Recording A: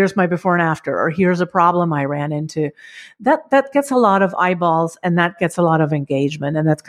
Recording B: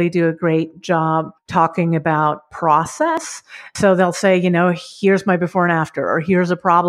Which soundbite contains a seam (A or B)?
B